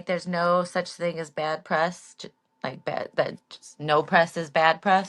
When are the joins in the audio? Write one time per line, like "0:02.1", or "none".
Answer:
none